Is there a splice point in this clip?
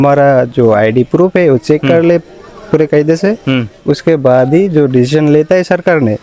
no; 0 cuts

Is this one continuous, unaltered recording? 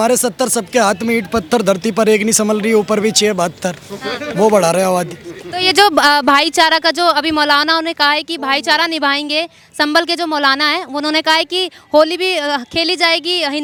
yes; 0 cuts

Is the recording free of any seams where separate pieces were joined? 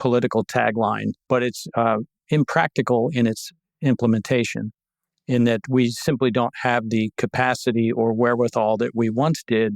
no; 1 cut; at 1.1 s

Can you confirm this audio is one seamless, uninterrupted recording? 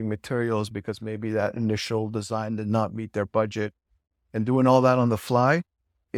yes; 0 cuts

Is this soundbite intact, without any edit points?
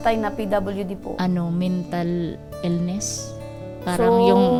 yes; 0 cuts

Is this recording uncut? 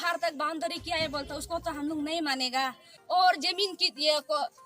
no; 1 cut; at 2.9 s

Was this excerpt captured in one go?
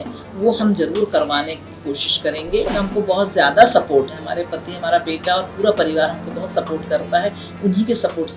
no; 1 cut; at 2.7 s

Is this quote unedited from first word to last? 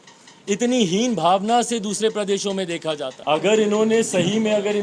no; 1 cut; at 3.1 s

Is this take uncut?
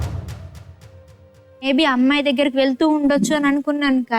no; 1 cut; at 1.6 s

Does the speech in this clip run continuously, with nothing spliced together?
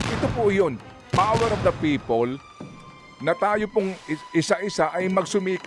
yes; 0 cuts

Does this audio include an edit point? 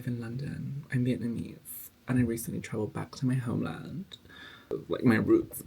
yes; 1 cut; at 4.7 s

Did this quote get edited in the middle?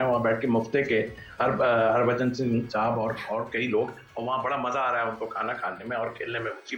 no; 0 cuts

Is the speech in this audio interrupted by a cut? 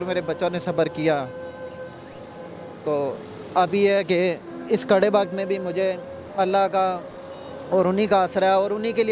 no; 0 cuts

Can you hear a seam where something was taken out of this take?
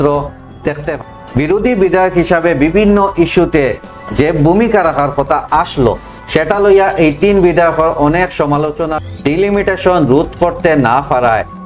yes; 2 cuts; at 0.9 s, 8.9 s

